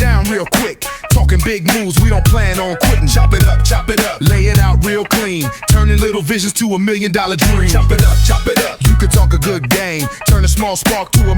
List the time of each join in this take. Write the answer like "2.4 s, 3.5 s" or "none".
none